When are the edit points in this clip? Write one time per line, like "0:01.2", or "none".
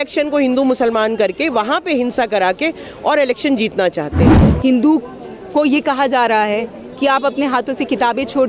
0:04.4